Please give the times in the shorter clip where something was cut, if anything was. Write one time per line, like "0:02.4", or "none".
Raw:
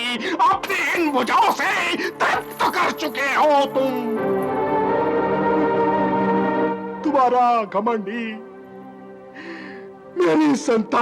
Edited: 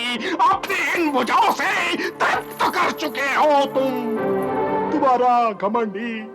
0:04.9